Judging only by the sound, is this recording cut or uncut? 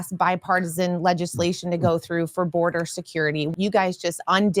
cut